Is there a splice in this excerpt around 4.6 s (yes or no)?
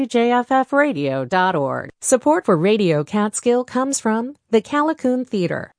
no